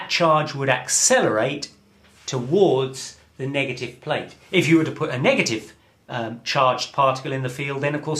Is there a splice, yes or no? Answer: yes